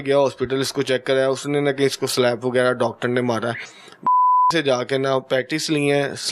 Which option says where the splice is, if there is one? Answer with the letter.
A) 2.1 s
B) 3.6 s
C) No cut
B